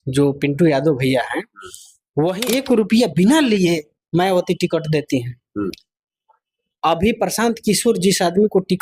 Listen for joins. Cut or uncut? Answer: cut